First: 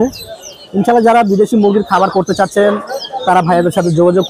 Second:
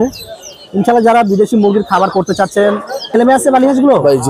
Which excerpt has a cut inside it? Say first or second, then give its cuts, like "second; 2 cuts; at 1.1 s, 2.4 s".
second; 1 cut; at 3.2 s